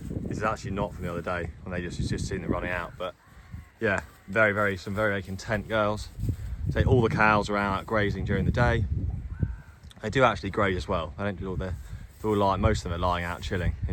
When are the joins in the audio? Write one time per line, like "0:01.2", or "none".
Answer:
none